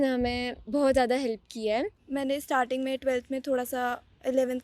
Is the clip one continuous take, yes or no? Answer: no